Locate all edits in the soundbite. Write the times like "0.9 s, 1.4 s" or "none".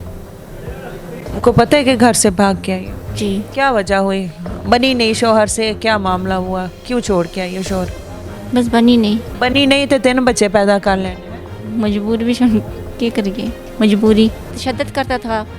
3.5 s, 9.3 s, 14.6 s